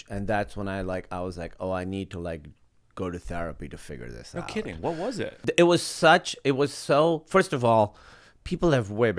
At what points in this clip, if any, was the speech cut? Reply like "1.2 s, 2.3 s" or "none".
5.4 s